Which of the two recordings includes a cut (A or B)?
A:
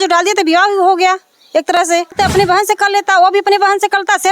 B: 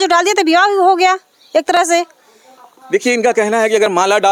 A